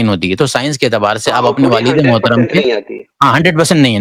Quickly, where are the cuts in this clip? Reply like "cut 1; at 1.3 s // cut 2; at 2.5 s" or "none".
none